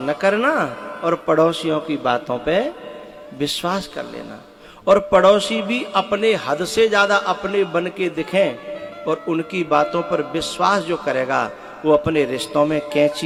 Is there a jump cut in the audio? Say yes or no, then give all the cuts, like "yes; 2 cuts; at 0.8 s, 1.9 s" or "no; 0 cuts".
no; 0 cuts